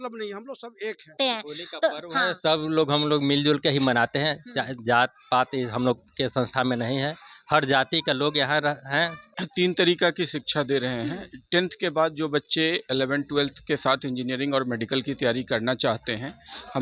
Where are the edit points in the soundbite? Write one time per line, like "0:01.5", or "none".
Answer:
0:01.1
0:09.4